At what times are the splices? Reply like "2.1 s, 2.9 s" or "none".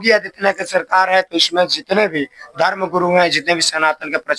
none